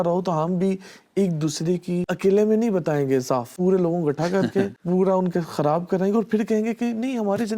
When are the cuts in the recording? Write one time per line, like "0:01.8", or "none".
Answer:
0:02.1
0:03.5
0:04.8